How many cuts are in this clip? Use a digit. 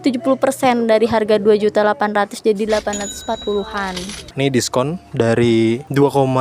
1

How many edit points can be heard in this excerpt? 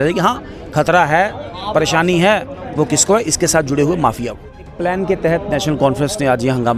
1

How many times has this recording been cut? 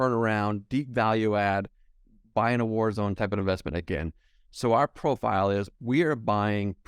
1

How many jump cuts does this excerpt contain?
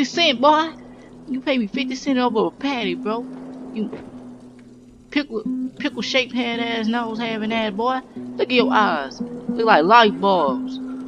0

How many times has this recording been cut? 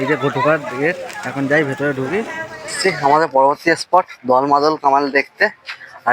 1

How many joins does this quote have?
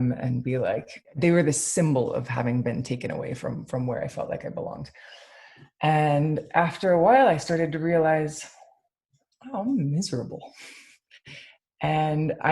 1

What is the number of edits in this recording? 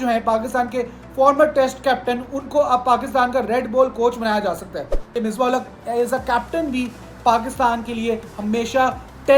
1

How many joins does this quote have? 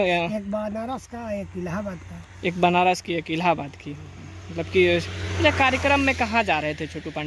0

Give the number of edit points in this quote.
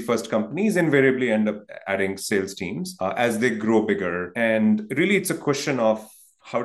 2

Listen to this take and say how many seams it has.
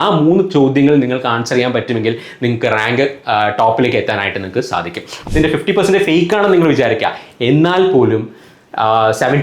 1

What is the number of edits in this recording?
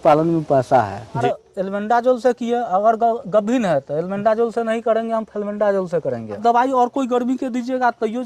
2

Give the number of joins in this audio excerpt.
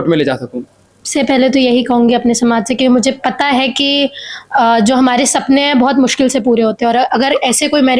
1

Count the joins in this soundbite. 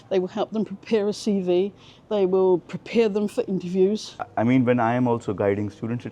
1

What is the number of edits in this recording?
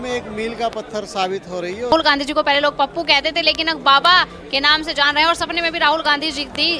1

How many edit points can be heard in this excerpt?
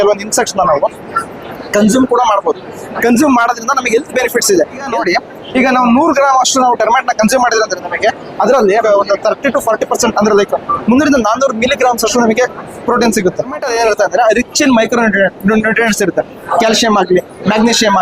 3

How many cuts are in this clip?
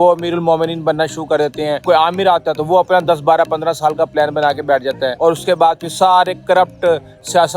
1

